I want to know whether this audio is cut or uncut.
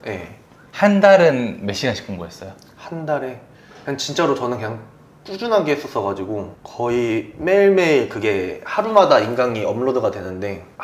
uncut